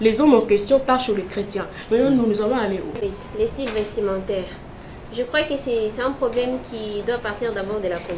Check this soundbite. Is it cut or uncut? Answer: cut